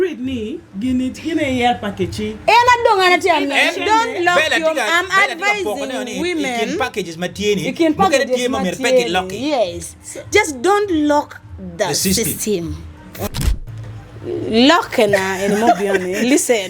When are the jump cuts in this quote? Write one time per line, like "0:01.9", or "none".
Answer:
0:13.3

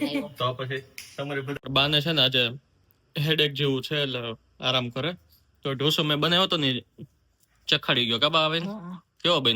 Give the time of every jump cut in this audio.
0:01.6

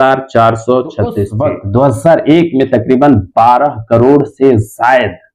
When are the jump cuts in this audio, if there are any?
0:01.3

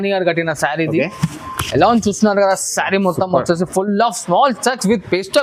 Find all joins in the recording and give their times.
none

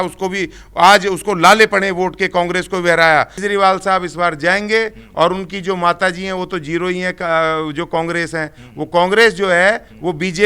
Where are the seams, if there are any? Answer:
0:03.4

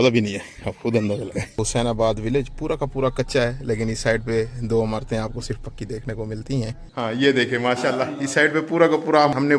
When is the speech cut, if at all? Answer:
0:01.3
0:06.8

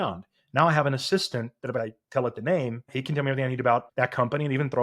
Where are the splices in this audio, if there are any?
0:01.8
0:03.0
0:03.9

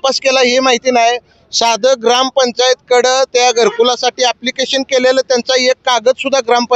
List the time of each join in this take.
none

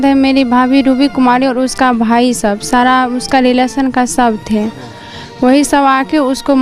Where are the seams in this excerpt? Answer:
none

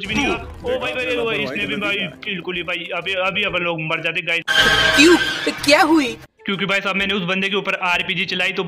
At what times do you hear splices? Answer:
0:06.3

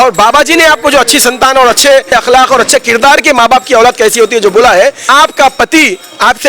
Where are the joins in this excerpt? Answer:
0:02.1
0:05.0

